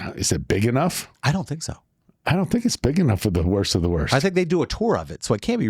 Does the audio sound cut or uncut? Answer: cut